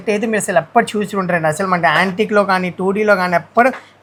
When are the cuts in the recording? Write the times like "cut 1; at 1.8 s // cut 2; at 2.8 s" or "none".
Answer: none